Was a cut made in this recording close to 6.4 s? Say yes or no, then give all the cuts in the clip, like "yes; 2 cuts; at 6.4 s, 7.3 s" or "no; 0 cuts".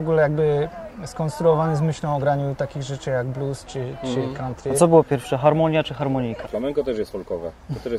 yes; 1 cut; at 6.4 s